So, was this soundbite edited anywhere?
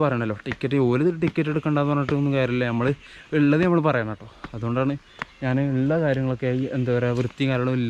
no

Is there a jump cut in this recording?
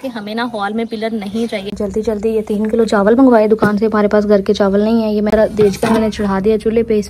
yes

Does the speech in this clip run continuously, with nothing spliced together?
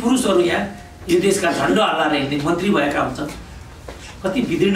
yes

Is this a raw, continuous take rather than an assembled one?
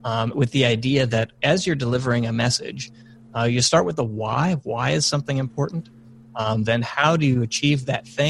yes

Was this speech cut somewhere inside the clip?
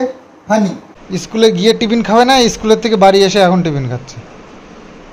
yes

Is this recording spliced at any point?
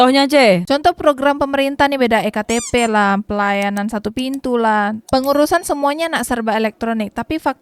no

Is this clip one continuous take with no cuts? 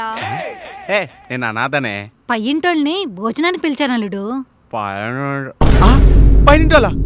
yes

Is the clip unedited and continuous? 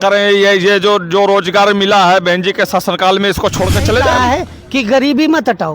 no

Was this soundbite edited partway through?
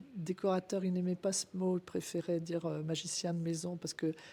no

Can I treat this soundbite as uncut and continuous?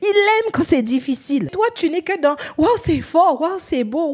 no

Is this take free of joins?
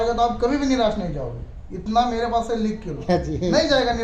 no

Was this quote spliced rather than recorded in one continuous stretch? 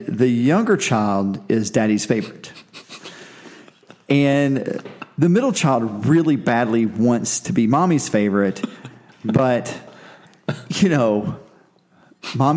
no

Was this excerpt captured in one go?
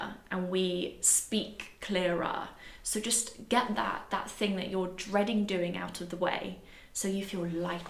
yes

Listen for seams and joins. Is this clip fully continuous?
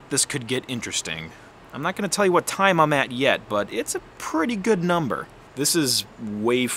no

